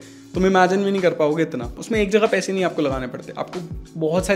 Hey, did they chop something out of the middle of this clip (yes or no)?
yes